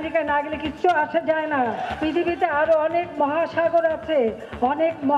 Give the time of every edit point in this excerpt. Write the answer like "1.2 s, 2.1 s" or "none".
1.9 s